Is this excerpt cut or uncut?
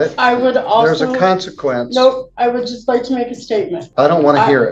cut